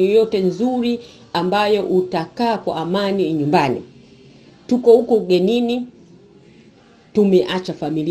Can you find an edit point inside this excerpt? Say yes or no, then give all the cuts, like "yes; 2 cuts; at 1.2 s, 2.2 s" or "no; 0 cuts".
no; 0 cuts